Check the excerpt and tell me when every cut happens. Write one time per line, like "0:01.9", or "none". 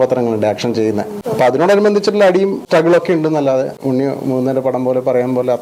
0:01.2
0:03.8